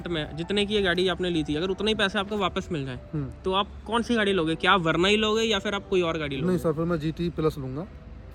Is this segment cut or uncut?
uncut